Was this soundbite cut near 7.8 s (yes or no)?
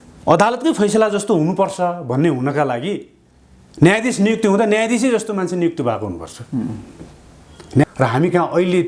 yes